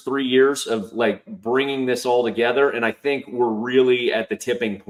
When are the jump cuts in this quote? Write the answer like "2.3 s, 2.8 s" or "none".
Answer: none